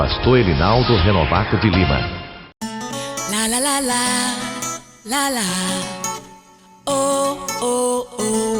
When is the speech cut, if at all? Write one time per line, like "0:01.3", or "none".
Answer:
0:02.3